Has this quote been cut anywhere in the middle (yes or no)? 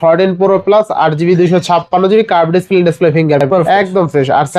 yes